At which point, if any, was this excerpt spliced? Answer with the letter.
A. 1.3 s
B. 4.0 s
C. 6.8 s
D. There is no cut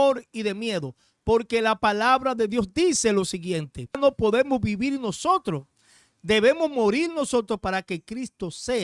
B